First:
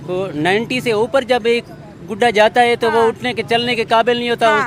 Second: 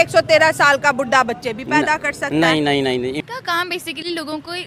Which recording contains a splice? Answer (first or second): second